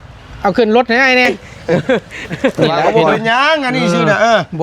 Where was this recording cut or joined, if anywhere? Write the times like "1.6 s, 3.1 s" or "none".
1.3 s